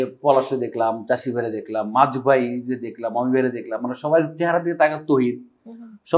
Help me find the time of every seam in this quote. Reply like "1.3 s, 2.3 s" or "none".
none